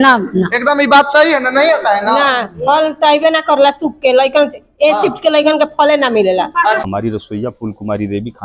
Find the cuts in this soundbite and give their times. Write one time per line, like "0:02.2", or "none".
0:06.8